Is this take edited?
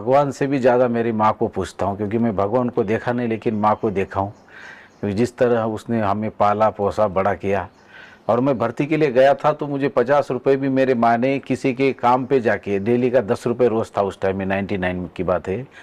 no; 0 cuts

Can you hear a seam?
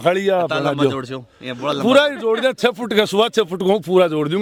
no; 0 cuts

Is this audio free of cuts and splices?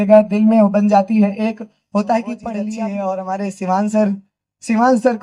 no; 1 cut; at 2.6 s

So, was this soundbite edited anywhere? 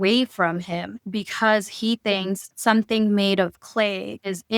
no; 0 cuts

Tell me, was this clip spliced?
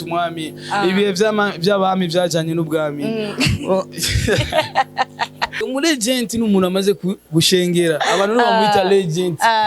yes; 1 cut; at 5.6 s

